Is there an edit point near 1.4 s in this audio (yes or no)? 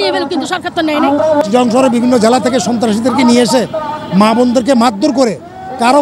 yes